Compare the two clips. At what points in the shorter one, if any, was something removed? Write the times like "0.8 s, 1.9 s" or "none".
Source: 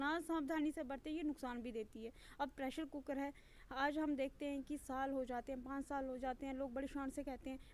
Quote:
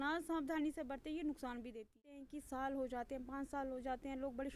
2.3 s